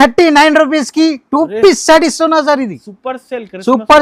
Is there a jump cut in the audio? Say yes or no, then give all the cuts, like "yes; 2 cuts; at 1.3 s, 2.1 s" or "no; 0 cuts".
no; 0 cuts